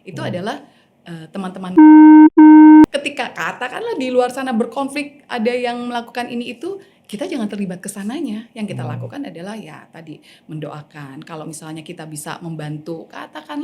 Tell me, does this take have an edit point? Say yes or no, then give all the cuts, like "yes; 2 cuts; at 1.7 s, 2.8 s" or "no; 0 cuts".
yes; 1 cut; at 2.9 s